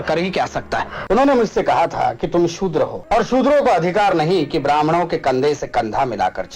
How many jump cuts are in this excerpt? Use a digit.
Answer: 2